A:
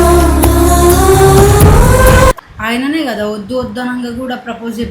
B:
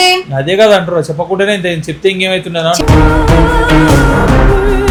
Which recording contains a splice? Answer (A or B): A